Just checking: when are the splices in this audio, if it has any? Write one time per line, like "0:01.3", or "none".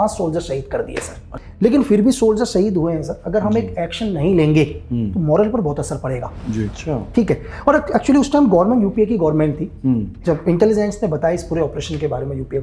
0:01.4
0:06.7